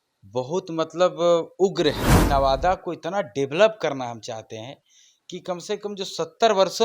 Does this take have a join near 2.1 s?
yes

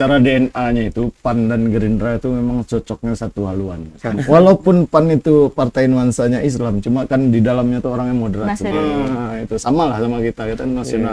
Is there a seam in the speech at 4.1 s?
yes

